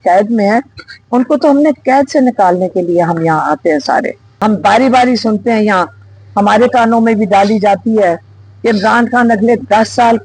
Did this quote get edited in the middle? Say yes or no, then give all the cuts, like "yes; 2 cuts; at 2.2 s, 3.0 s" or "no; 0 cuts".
yes; 1 cut; at 4.2 s